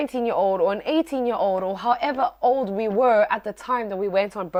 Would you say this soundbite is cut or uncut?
uncut